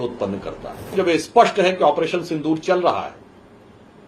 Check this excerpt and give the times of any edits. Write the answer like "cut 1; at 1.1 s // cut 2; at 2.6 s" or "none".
cut 1; at 0.9 s